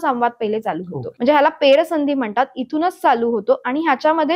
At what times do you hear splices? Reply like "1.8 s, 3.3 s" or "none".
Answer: 1.0 s